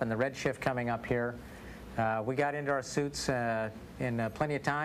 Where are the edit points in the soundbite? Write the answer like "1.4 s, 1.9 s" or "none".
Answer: 2.7 s